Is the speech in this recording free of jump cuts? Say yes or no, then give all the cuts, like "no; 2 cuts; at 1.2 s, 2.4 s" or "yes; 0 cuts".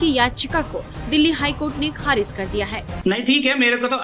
no; 1 cut; at 2.9 s